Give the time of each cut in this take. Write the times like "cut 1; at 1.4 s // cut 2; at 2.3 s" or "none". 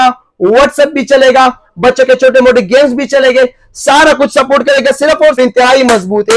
cut 1; at 5.4 s